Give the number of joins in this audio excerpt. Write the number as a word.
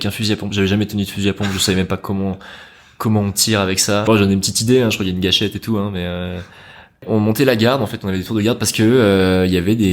two